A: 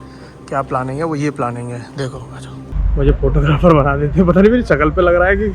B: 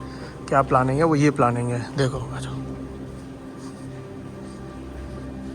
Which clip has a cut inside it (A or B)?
A